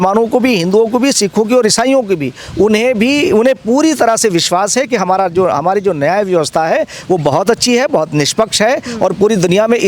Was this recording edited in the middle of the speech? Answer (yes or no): no